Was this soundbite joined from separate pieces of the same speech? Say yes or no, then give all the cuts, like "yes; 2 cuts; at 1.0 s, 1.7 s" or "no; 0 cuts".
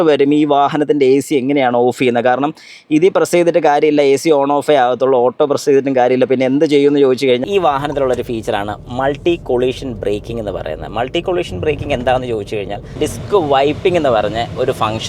yes; 2 cuts; at 7.4 s, 13.0 s